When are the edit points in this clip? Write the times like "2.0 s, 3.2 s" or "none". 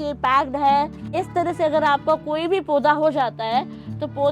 1.1 s